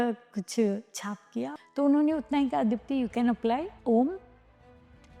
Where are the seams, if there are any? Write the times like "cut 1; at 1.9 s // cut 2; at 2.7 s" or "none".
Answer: cut 1; at 1.5 s // cut 2; at 3.7 s